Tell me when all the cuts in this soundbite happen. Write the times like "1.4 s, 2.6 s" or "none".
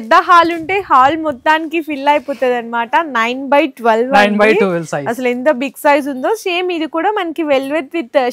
none